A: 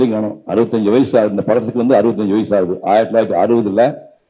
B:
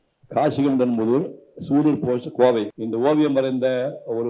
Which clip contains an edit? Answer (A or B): B